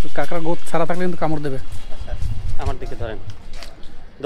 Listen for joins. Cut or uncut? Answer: uncut